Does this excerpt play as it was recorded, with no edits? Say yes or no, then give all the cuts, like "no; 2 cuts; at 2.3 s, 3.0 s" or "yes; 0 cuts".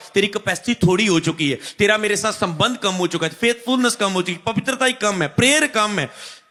yes; 0 cuts